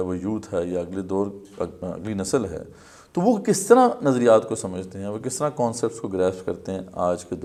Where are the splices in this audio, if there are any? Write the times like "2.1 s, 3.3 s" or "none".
none